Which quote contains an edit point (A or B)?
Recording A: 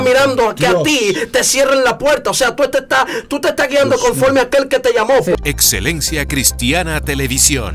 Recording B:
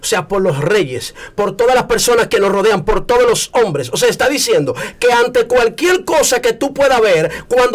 A